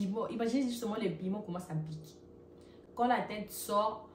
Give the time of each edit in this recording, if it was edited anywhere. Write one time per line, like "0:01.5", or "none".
none